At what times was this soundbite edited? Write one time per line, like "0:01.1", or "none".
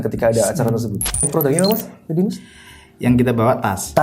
0:01.3